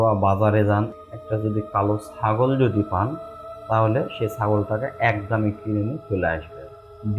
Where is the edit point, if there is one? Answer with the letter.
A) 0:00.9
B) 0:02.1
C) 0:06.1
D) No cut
A